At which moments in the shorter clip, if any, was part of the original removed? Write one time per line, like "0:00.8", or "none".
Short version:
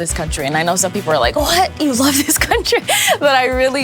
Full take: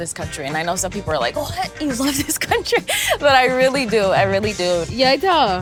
none